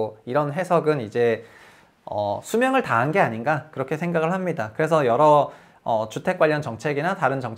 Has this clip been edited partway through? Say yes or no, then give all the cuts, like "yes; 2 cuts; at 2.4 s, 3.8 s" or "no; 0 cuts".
no; 0 cuts